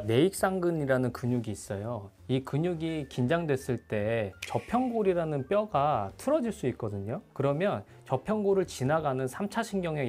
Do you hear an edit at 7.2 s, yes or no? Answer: no